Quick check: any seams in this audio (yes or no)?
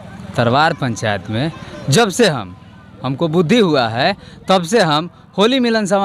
no